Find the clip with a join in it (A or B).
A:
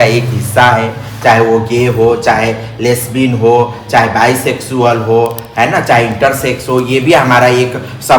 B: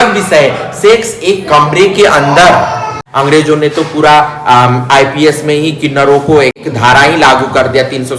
B